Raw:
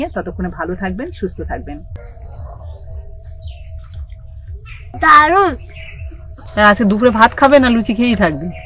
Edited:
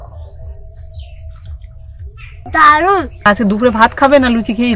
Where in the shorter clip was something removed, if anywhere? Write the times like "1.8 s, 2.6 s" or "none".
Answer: 3.3 s